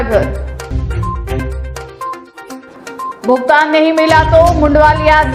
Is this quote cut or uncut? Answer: uncut